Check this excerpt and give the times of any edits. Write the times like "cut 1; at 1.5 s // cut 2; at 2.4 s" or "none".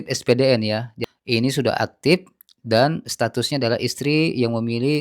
cut 1; at 0.9 s